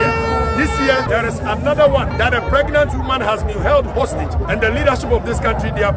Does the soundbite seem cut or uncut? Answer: cut